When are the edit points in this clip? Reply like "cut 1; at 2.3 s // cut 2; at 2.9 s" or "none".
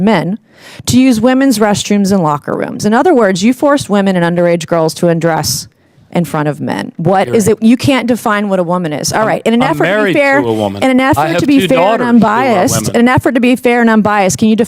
cut 1; at 6.9 s